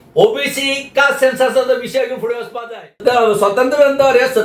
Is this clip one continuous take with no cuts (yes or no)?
no